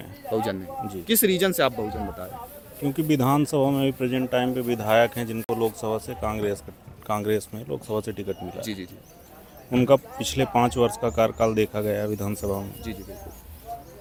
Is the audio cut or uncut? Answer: uncut